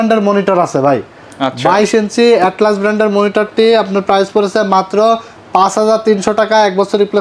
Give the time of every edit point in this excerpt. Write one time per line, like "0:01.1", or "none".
none